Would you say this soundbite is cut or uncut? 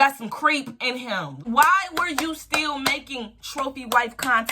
cut